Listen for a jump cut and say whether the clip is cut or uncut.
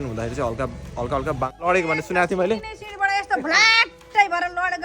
cut